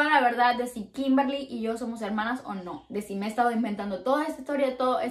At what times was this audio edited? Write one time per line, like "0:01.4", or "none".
none